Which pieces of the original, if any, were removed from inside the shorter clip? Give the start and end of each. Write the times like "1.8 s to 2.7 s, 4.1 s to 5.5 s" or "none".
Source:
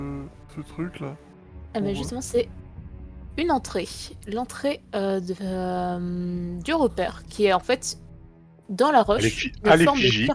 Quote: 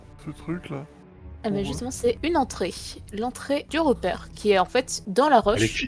2.5 s to 3.3 s, 4.8 s to 6.6 s, 7.9 s to 8.6 s